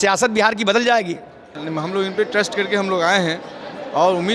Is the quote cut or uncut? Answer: cut